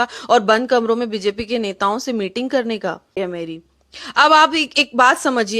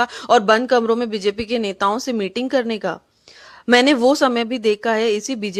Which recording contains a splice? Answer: first; 1 cut; at 3.2 s

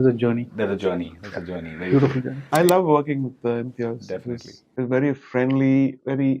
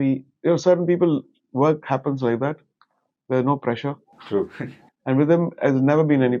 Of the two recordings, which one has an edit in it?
first; 1 cut; at 2.5 s

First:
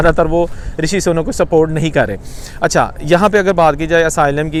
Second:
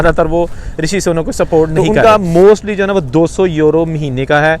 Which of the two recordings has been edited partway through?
second; 1 cut; at 1.7 s

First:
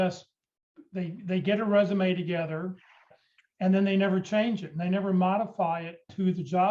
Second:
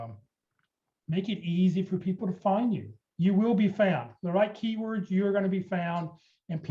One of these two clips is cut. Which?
first; 1 cut; at 3.2 s

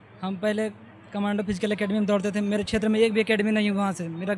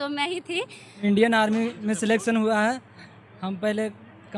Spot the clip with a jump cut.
second; 1 cut; at 1.0 s

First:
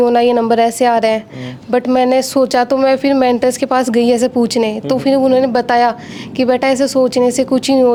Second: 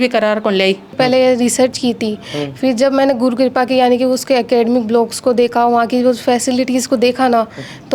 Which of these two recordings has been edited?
second; 1 cut; at 0.9 s

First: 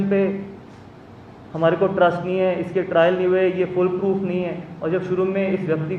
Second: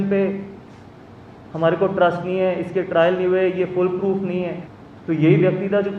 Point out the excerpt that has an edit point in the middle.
second; 1 cut; at 4.7 s

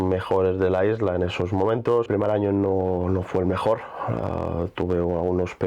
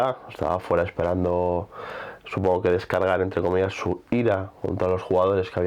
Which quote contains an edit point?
first; 1 cut; at 2.1 s

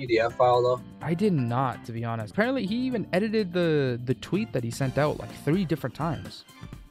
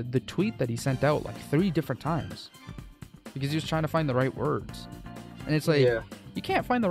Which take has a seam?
first; 1 cut; at 2.3 s

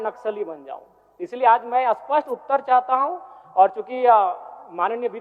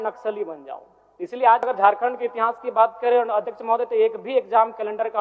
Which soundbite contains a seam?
second; 1 cut; at 1.7 s

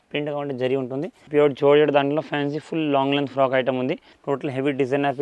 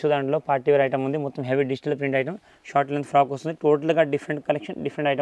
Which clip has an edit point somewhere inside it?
first; 2 cuts; at 1.2 s, 4.1 s

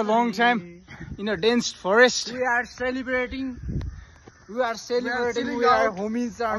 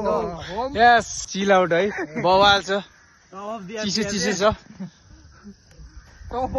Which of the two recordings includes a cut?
second; 1 cut; at 1.2 s

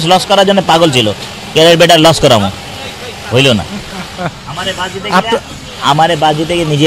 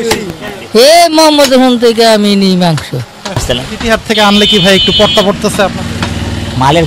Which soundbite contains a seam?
second; 1 cut; at 3.4 s

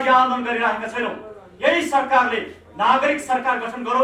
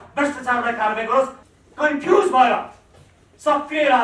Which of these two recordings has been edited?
second; 1 cut; at 1.4 s

